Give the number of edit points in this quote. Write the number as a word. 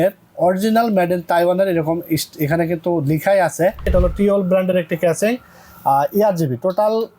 one